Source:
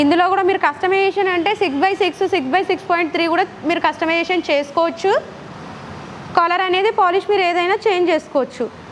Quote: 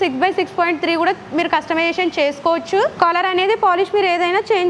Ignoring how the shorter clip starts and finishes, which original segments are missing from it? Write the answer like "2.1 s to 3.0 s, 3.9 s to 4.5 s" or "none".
5.2 s to 6.3 s